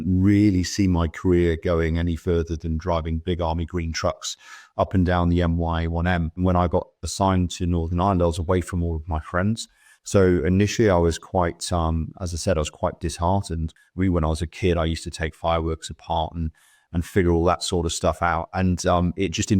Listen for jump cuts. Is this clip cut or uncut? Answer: cut